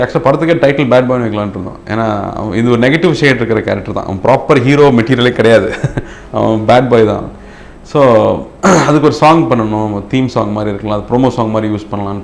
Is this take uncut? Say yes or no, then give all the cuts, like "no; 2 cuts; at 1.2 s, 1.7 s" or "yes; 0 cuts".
yes; 0 cuts